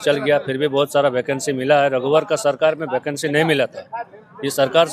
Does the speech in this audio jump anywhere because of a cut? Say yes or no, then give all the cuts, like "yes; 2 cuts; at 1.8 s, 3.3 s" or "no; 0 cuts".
no; 0 cuts